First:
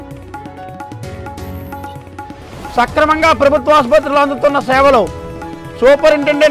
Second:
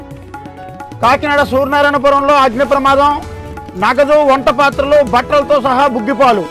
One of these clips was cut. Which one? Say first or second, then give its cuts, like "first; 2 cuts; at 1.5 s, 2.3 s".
first; 2 cuts; at 1.0 s, 2.3 s